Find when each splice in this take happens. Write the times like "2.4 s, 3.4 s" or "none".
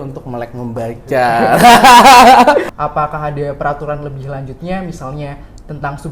2.8 s

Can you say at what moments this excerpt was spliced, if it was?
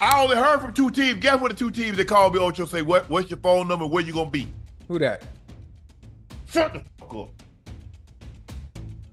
none

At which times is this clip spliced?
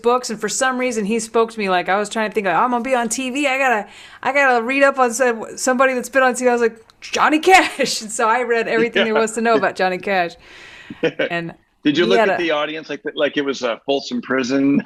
none

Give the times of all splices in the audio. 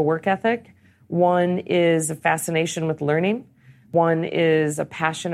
3.9 s

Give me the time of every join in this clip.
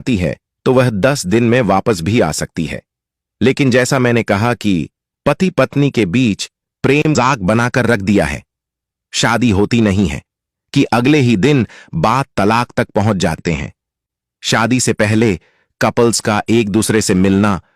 7.1 s, 13.4 s

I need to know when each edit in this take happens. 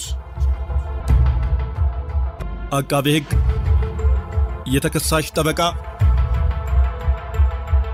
none

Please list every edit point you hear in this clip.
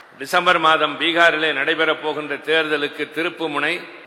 none

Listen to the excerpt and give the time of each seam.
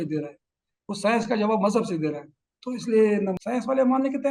3.3 s

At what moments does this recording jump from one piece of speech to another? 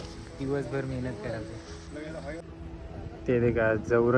2.6 s

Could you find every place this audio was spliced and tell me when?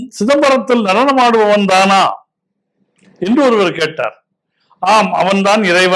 none

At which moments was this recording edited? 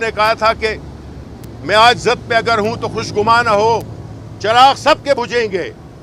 none

